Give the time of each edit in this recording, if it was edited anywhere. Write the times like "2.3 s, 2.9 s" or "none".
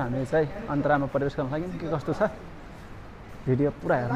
none